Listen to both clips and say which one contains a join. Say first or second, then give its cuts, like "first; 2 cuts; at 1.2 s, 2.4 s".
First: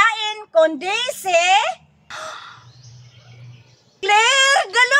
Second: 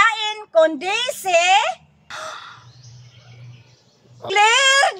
first; 1 cut; at 4.0 s